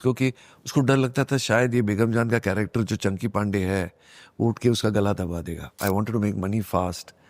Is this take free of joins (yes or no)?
no